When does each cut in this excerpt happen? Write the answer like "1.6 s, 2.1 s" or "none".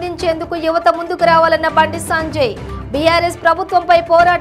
none